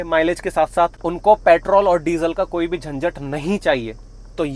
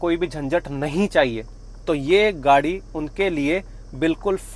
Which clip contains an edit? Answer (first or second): first